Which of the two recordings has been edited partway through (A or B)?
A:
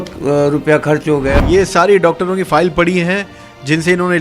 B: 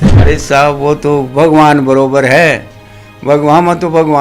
A